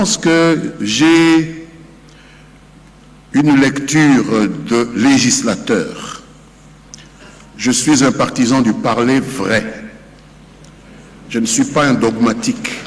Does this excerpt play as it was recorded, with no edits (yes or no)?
yes